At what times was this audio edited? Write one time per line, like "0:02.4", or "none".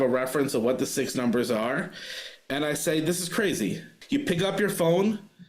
0:03.9